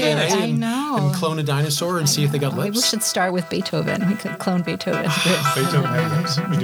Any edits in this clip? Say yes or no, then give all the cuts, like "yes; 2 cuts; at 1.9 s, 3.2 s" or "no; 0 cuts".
no; 0 cuts